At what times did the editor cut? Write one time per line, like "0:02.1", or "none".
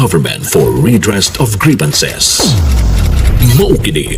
none